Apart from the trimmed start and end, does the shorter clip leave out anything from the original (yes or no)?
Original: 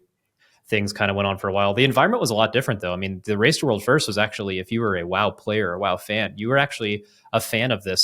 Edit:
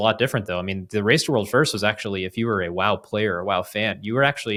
no